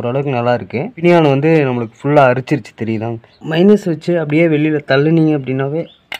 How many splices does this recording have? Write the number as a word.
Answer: two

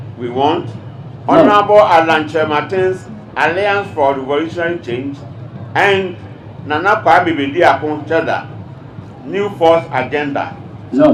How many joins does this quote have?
zero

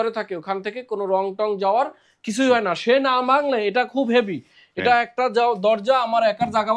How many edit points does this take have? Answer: zero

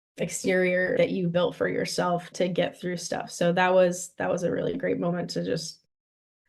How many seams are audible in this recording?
two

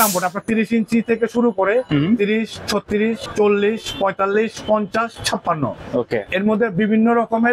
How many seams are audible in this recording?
one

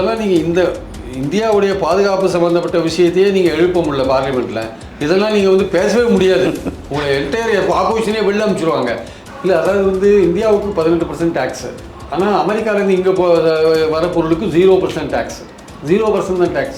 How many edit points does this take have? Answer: one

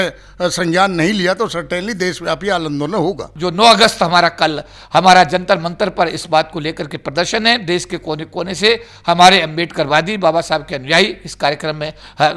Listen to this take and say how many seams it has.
one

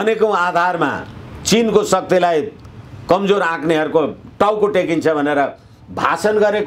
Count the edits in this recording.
zero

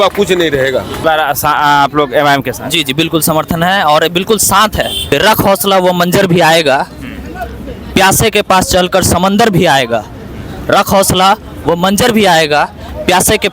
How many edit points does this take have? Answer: two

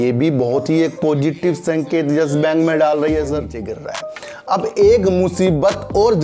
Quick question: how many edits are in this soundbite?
one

